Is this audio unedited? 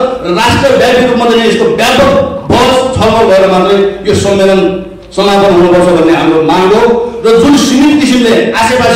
yes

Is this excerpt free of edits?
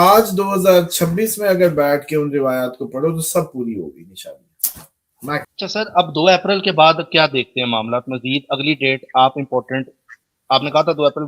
no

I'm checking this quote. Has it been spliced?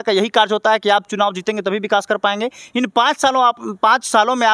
no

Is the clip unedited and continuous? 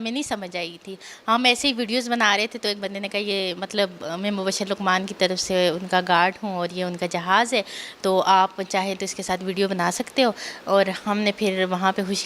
yes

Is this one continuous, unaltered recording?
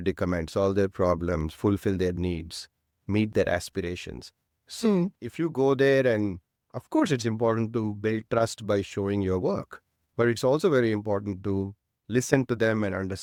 yes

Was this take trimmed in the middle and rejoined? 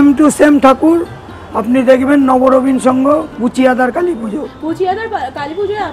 no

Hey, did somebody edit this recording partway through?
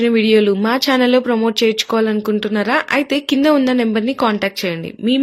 no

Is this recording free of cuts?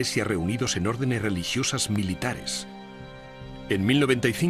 yes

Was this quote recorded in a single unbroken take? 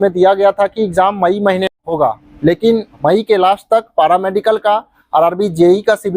no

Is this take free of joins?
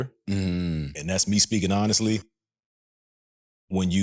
yes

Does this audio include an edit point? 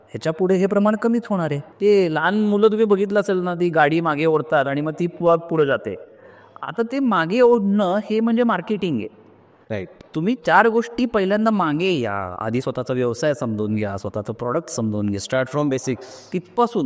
yes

